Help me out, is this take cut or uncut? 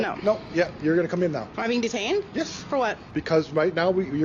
cut